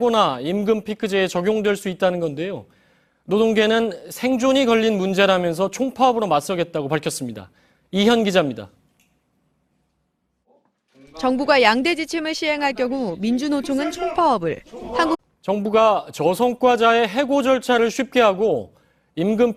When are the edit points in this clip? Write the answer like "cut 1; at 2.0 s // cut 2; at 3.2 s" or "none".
none